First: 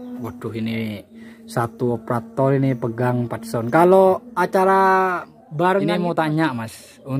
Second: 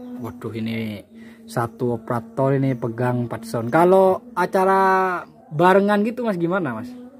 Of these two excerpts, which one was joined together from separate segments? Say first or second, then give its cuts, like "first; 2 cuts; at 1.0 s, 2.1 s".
first; 1 cut; at 5.9 s